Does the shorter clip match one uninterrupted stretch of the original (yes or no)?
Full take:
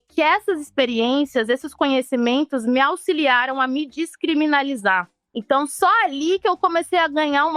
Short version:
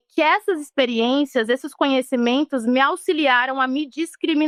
yes